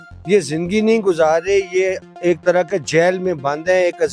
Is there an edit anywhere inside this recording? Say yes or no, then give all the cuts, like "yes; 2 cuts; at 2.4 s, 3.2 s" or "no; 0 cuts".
no; 0 cuts